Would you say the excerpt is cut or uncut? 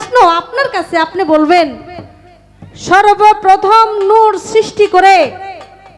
uncut